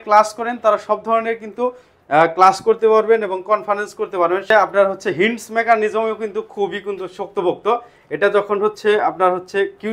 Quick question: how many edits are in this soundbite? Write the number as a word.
one